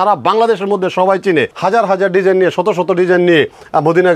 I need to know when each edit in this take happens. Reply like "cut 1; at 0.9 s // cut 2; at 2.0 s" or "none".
cut 1; at 1.5 s